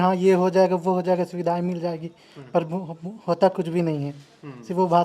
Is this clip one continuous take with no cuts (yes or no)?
yes